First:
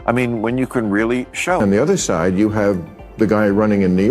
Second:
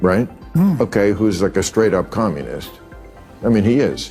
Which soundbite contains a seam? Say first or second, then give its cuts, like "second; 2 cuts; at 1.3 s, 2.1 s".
first; 1 cut; at 1.4 s